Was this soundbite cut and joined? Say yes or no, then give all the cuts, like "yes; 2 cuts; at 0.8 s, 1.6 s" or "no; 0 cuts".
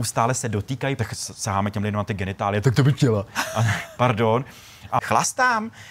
yes; 3 cuts; at 1.0 s, 3.4 s, 5.0 s